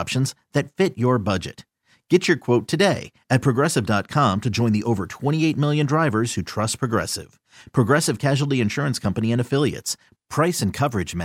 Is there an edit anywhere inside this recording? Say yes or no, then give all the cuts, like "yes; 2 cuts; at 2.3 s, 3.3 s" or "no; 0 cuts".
no; 0 cuts